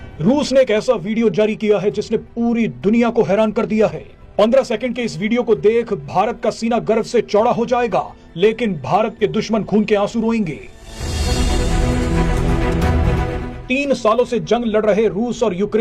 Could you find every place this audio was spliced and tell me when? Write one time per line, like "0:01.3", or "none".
none

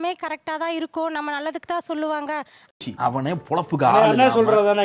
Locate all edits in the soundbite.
none

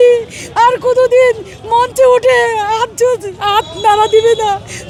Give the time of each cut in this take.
none

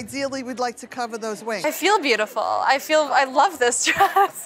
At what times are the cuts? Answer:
0:01.6

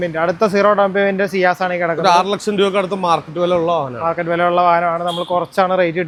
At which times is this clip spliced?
none

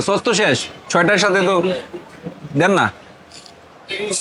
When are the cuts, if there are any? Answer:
none

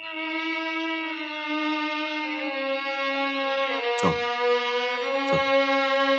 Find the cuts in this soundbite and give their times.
none

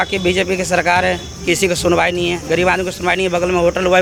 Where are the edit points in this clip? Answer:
none

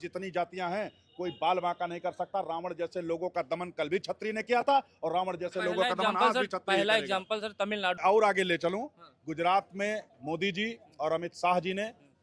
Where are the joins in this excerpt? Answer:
0:08.0

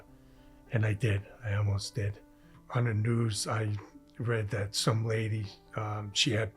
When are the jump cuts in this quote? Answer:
0:02.6

